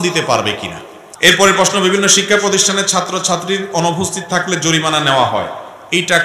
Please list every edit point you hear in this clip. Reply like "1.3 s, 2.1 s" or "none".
1.3 s